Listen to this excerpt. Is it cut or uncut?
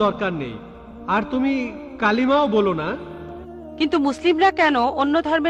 cut